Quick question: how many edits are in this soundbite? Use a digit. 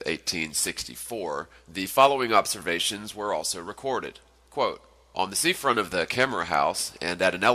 1